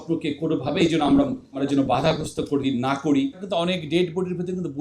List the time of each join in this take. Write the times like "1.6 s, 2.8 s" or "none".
1.6 s, 3.4 s